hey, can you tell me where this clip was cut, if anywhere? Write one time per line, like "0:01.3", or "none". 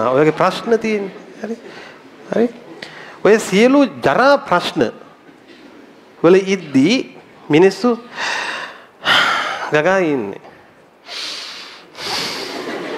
none